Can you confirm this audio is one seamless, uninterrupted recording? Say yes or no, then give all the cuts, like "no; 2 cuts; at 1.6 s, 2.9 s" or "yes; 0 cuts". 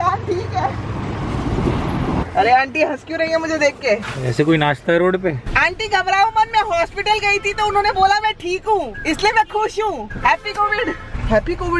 no; 3 cuts; at 2.2 s, 5.5 s, 8.9 s